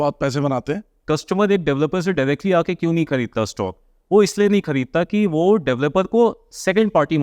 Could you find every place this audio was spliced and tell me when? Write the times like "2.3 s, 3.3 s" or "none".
0.9 s